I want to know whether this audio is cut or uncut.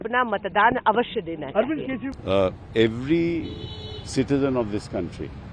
cut